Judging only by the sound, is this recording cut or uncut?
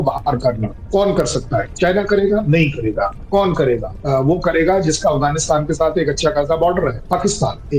uncut